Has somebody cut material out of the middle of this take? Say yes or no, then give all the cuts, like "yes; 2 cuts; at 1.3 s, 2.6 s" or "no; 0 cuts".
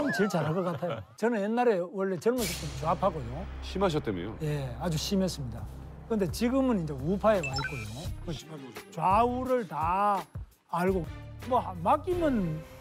yes; 2 cuts; at 1.0 s, 11.1 s